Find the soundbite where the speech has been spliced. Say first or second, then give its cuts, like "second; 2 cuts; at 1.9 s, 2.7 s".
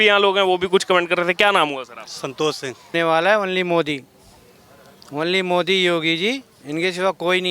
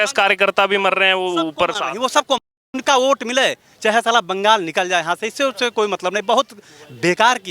first; 1 cut; at 2.9 s